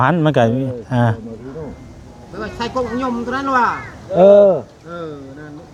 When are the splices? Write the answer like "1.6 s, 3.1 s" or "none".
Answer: none